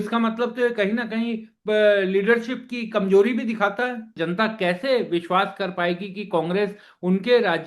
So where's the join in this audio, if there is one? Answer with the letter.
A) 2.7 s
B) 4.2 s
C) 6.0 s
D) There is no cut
B